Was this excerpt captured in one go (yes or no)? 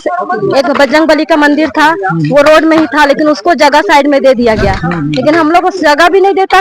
yes